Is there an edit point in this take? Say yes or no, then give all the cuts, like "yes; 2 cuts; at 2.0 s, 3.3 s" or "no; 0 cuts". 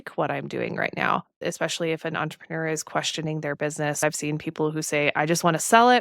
yes; 2 cuts; at 1.4 s, 4.0 s